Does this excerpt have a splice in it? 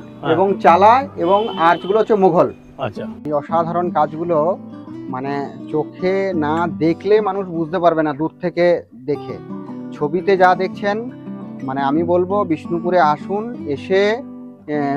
yes; 1 cut; at 3.2 s

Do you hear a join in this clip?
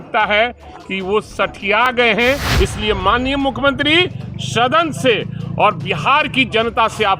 yes; 1 cut; at 2.5 s

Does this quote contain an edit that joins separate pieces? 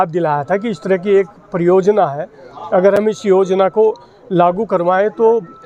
no; 0 cuts

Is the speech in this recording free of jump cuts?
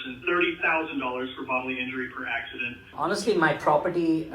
no; 1 cut; at 2.9 s

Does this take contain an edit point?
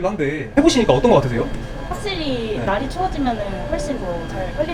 no; 0 cuts

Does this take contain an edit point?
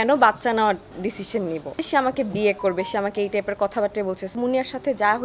yes; 2 cuts; at 1.8 s, 4.3 s

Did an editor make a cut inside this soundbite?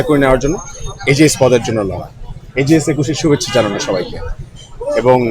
no; 0 cuts

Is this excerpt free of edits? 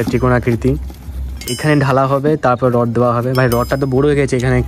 yes; 0 cuts

